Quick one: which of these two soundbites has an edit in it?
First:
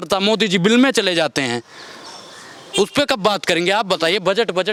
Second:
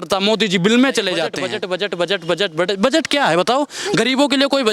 second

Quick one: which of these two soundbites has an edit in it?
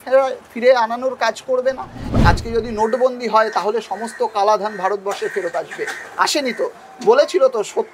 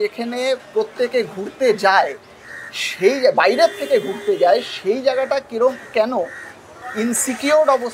first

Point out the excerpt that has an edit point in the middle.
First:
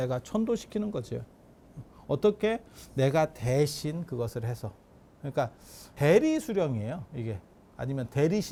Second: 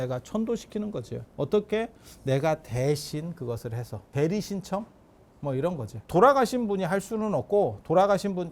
second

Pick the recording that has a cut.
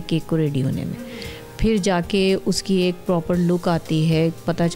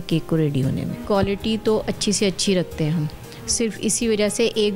second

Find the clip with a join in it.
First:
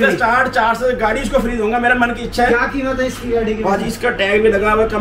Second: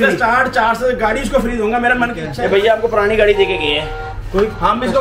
second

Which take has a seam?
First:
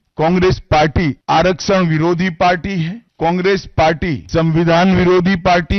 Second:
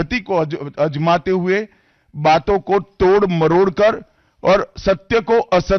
first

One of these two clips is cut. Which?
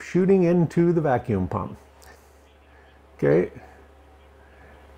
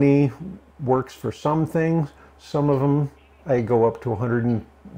first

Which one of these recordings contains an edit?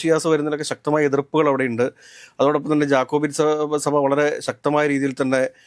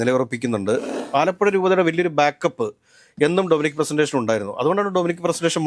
second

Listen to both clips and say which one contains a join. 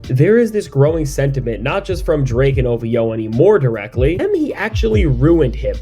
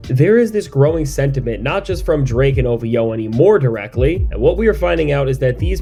first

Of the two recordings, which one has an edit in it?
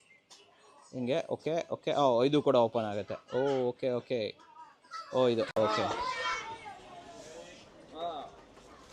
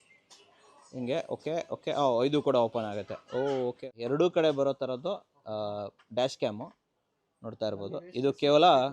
second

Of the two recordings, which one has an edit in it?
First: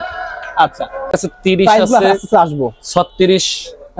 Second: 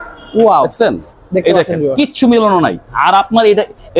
first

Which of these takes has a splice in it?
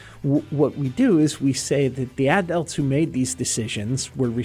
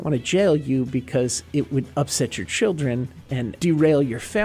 second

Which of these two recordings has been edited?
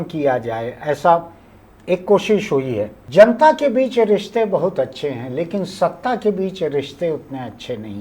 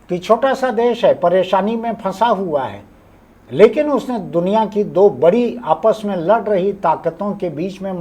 first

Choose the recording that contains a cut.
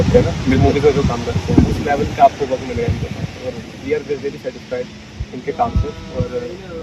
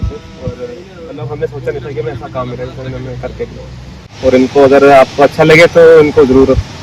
second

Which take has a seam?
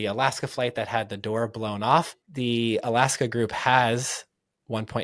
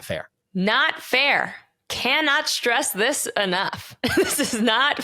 first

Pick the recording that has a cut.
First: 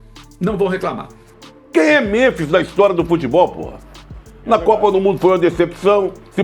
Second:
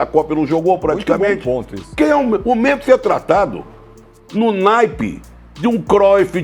first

